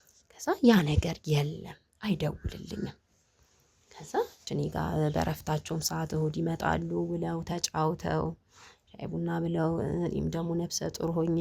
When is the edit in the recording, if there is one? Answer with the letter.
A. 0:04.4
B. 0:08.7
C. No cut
A